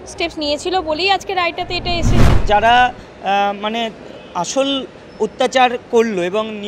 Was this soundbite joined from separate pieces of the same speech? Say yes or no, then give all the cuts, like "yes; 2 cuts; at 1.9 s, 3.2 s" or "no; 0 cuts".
yes; 1 cut; at 2.4 s